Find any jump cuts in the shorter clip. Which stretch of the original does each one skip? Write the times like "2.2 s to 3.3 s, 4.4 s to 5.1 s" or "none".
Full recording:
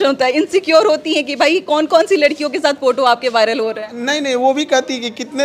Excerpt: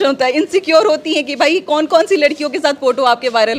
none